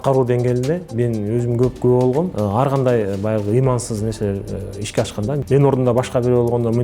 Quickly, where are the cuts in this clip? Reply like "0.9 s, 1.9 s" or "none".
2.3 s, 5.4 s